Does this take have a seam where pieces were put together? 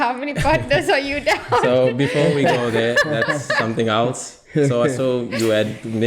no; 0 cuts

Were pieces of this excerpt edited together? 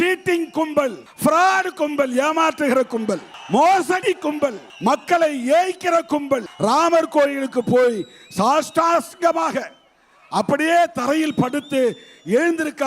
yes; 4 cuts; at 1.1 s, 3.3 s, 4.7 s, 6.5 s

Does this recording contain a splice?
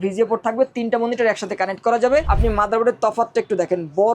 yes; 1 cut; at 2.3 s

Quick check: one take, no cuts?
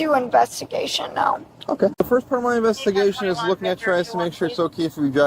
no; 1 cut; at 2.0 s

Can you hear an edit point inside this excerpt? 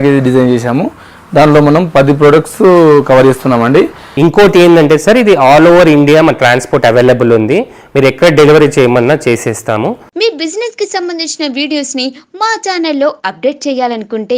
yes; 2 cuts; at 4.0 s, 10.0 s

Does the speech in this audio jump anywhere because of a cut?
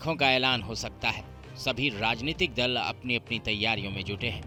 no; 0 cuts

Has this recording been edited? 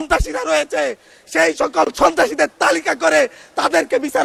no; 0 cuts

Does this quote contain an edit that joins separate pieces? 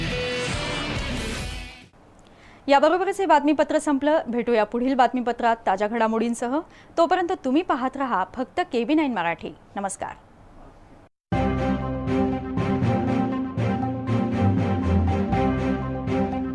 no; 0 cuts

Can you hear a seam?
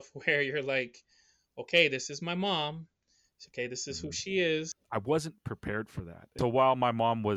yes; 2 cuts; at 4.8 s, 6.3 s

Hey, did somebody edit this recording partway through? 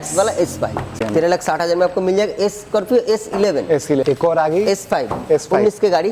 yes; 2 cuts; at 1.0 s, 4.0 s

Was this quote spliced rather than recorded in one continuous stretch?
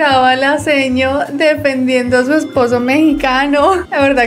no; 0 cuts

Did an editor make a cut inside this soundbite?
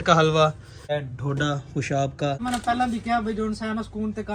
yes; 2 cuts; at 0.9 s, 2.4 s

